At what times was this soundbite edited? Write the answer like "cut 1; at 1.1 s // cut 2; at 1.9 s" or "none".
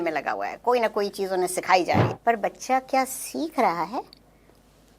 cut 1; at 2.1 s